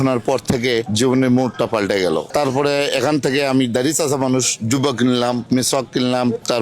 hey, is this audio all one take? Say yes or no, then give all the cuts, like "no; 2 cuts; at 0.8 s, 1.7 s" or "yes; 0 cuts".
no; 1 cut; at 2.3 s